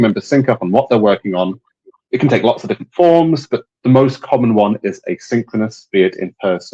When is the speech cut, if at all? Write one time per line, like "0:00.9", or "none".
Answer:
0:02.0